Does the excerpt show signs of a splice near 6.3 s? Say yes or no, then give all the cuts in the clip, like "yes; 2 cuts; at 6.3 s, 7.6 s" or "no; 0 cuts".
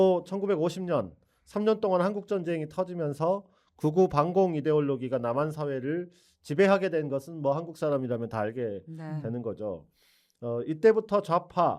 no; 0 cuts